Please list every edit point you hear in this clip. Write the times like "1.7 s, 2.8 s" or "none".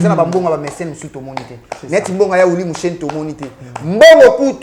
none